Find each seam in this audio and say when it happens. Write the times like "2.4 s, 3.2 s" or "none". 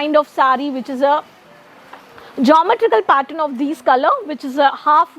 none